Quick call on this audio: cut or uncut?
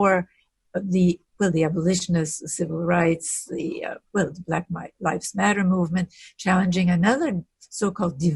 uncut